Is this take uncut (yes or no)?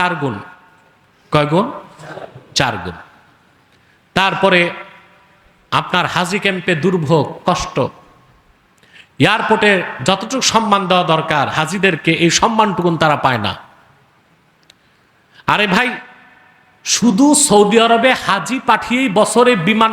yes